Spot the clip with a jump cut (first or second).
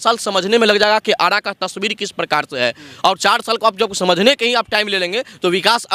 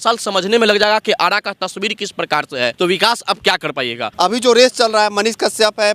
second